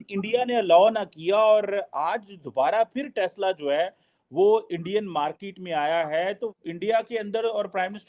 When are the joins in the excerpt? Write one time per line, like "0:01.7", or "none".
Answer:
none

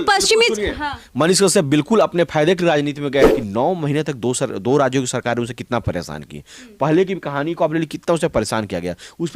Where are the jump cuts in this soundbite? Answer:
0:03.3

